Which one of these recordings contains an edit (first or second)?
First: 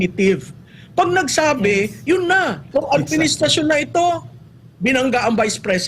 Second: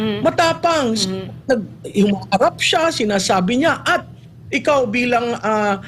first